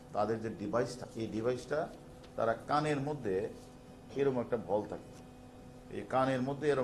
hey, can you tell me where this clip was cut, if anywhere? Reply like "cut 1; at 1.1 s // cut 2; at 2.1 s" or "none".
cut 1; at 1.0 s // cut 2; at 5.8 s